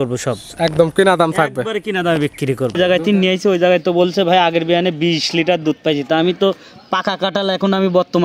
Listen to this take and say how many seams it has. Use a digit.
1